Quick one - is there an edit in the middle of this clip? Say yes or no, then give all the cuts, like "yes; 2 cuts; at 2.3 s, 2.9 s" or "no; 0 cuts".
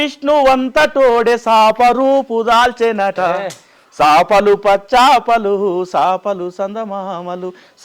no; 0 cuts